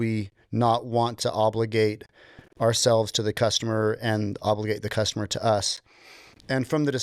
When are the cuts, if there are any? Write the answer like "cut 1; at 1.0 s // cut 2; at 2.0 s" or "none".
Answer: none